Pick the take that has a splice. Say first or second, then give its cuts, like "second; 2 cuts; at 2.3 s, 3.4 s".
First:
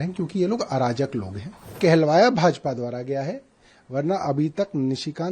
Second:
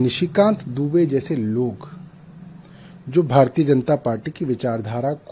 first; 1 cut; at 1.8 s